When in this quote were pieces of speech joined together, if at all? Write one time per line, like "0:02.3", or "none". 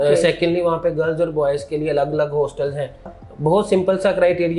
0:03.1